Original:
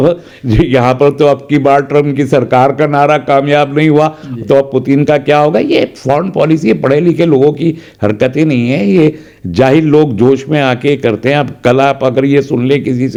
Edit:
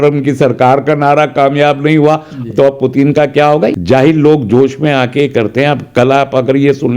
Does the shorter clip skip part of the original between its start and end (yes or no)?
yes